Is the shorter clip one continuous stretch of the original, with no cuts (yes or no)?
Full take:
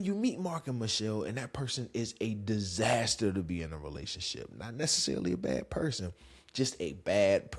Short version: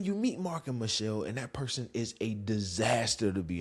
yes